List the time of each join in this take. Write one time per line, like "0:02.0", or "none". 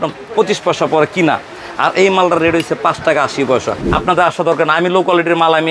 0:03.8